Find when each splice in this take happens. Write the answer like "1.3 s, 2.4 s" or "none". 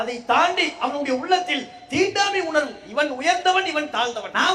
none